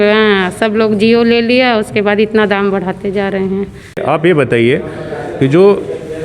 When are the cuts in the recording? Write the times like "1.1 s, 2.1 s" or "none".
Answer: 3.9 s